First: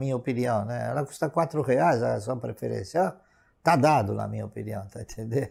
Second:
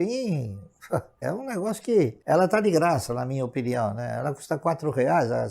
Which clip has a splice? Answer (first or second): second